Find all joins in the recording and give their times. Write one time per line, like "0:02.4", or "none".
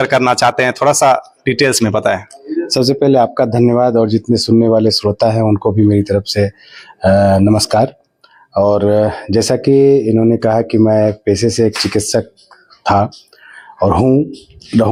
none